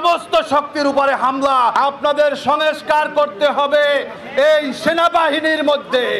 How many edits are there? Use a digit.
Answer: 1